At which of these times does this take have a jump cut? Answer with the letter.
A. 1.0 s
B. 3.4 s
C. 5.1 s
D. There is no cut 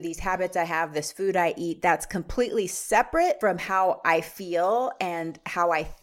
B